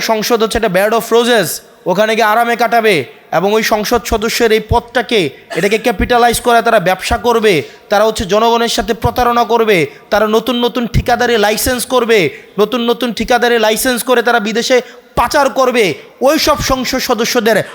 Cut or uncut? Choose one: uncut